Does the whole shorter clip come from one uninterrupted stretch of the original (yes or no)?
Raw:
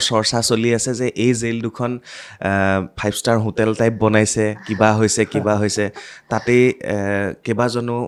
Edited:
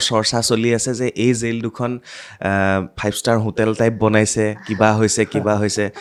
yes